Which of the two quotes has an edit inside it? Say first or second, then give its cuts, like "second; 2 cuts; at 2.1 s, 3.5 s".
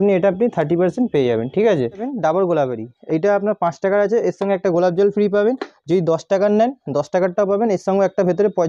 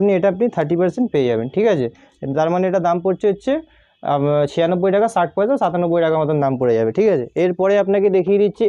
first; 1 cut; at 2.1 s